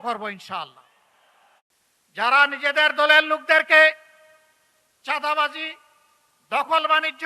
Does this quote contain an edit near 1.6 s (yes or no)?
yes